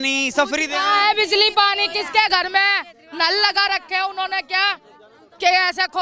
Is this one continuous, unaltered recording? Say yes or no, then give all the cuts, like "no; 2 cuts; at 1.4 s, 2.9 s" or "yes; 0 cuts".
yes; 0 cuts